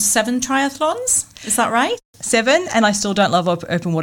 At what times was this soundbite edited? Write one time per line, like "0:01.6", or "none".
0:02.1